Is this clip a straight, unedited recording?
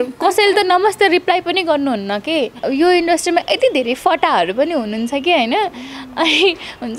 no; 1 cut; at 2.6 s

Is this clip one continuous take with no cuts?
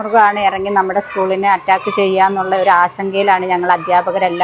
yes; 0 cuts

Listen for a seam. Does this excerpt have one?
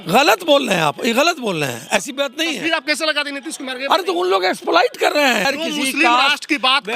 yes; 1 cut; at 5.5 s

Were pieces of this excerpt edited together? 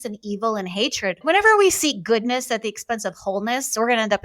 yes; 1 cut; at 1.2 s

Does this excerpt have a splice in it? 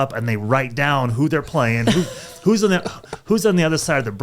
no; 0 cuts

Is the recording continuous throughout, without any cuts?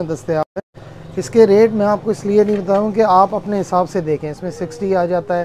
yes; 0 cuts

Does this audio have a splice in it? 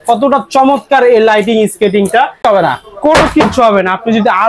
yes; 1 cut; at 2.4 s

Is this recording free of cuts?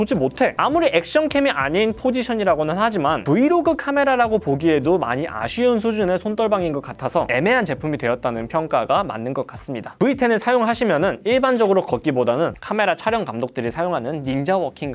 yes; 0 cuts

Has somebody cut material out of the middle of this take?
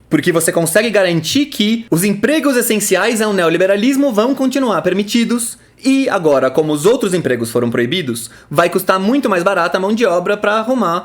yes; 1 cut; at 1.8 s

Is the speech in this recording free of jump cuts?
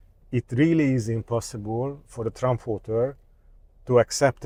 yes; 0 cuts

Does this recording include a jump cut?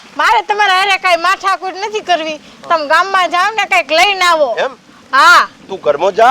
no; 0 cuts

